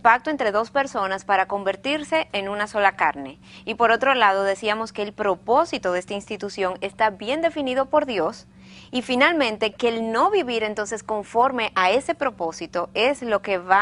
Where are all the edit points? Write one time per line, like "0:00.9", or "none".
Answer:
none